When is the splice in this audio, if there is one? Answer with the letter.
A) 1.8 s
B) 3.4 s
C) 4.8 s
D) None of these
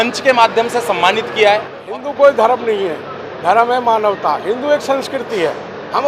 A